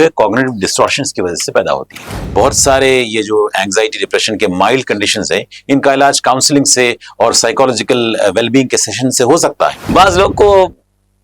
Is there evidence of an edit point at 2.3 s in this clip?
yes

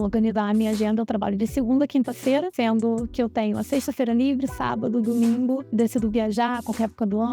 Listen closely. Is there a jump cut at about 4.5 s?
no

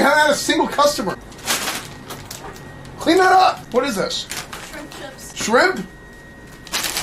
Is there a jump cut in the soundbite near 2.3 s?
no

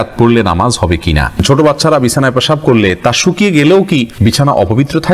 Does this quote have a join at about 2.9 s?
no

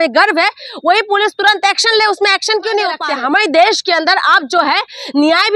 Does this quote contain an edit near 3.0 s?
yes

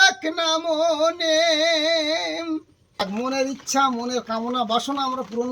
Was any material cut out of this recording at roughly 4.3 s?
no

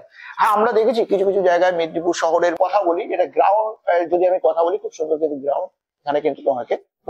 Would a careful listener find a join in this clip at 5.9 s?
no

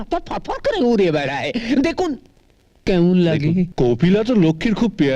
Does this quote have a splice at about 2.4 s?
no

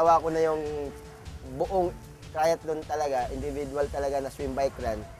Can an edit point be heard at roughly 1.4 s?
no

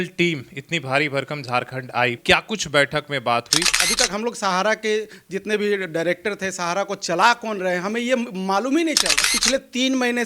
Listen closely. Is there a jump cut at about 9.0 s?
no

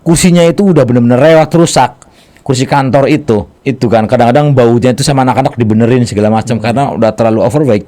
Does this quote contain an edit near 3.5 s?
yes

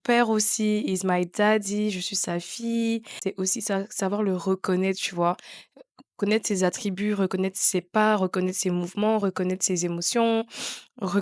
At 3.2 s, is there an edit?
yes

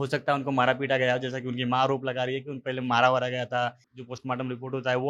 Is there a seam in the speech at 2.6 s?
no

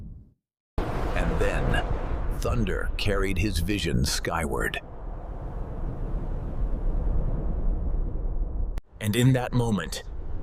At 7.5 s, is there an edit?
no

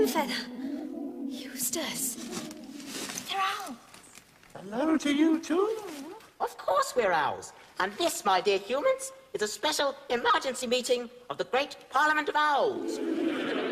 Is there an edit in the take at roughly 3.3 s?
no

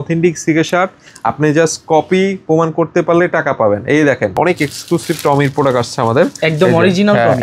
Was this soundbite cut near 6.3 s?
no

